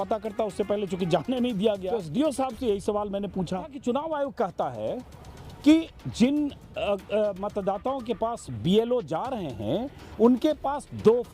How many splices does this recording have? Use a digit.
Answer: 2